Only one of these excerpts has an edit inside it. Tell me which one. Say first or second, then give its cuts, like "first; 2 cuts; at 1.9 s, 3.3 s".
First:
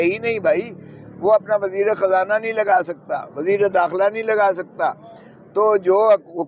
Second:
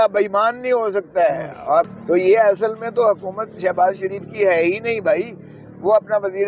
second; 1 cut; at 1.9 s